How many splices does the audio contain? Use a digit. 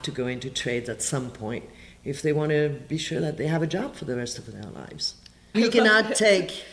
1